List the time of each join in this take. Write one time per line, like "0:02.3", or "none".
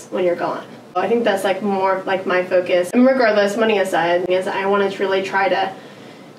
0:01.0
0:02.9
0:04.3